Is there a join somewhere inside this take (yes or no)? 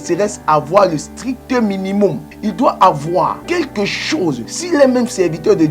yes